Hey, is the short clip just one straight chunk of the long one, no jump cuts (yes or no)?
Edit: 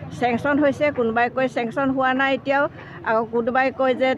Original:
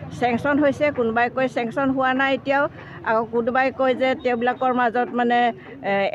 yes